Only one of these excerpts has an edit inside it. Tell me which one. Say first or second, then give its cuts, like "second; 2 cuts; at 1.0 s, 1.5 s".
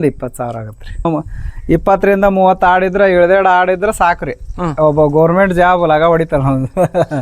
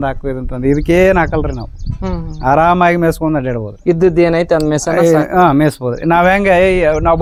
first; 1 cut; at 1.1 s